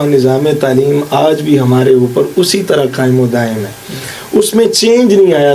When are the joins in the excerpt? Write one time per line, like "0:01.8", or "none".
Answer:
none